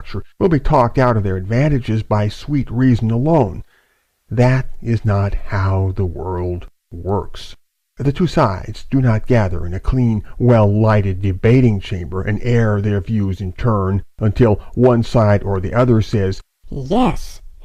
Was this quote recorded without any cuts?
yes; 0 cuts

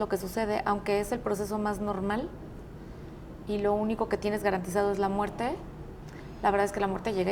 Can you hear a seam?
no; 0 cuts

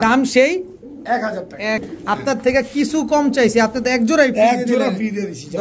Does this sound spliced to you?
yes; 1 cut; at 1.8 s

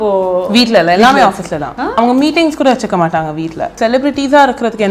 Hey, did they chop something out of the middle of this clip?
yes; 2 cuts; at 1.9 s, 3.7 s

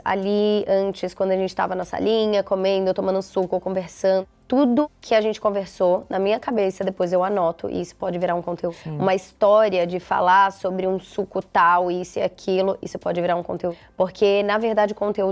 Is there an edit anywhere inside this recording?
yes; 4 cuts; at 4.2 s, 5.0 s, 8.8 s, 13.8 s

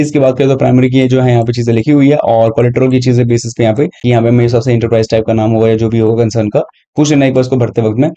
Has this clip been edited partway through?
yes; 1 cut; at 4.0 s

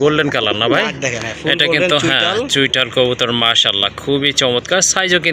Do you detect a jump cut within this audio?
no; 0 cuts

